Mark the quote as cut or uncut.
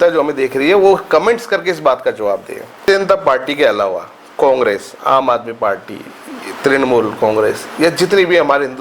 cut